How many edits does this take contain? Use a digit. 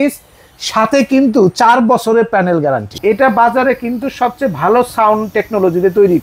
1